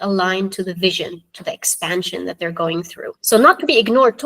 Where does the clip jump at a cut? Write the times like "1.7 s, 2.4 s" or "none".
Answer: 3.1 s

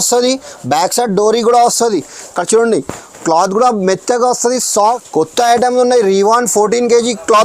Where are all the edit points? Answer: 4.8 s

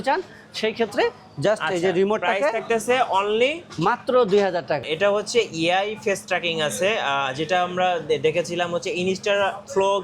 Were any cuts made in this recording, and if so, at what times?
4.8 s

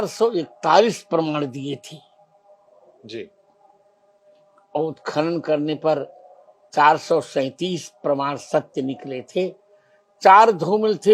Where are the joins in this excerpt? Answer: none

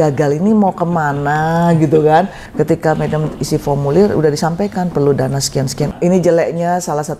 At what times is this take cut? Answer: 2.4 s, 5.9 s

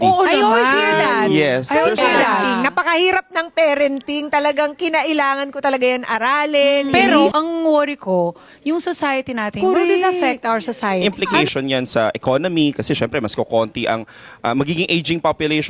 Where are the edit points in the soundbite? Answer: 2.5 s, 7.3 s, 11.0 s

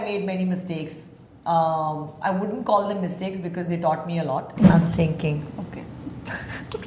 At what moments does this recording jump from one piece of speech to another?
4.7 s

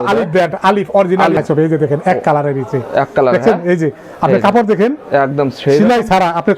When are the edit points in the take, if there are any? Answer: 1.4 s

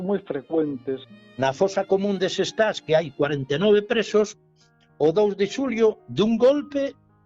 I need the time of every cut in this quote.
1.0 s

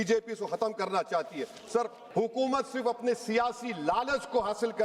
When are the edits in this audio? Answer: 2.0 s

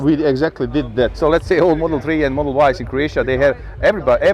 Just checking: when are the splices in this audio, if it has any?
1.1 s

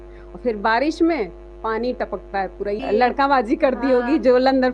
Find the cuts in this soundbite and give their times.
2.8 s

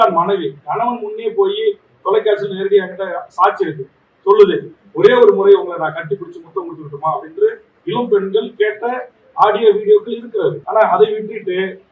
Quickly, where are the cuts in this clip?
10.6 s

